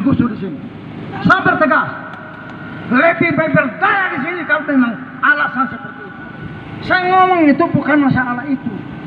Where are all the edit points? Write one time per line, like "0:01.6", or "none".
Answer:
none